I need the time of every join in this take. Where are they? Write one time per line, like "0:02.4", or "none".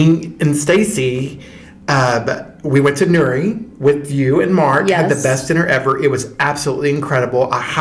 none

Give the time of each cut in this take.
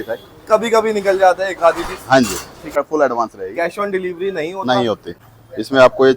0:02.8
0:05.1

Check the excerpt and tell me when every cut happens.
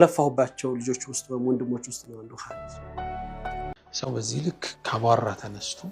0:03.7

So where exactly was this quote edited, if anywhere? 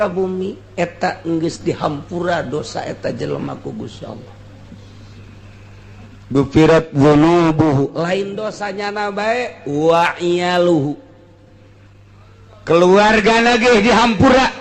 0:05.6

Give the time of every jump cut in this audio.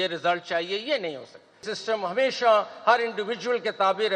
0:01.6

